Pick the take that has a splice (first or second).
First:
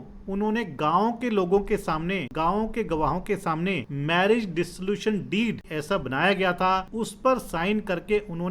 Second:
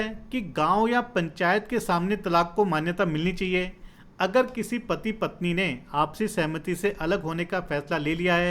first